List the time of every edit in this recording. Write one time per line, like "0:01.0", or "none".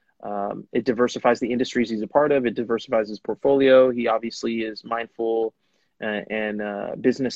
none